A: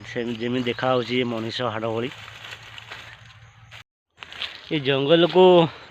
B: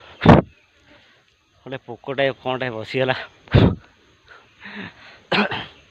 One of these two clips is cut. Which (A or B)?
A